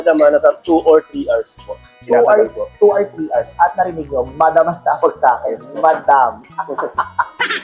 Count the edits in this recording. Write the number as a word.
zero